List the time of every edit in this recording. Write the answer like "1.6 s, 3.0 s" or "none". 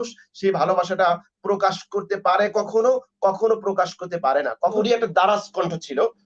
4.8 s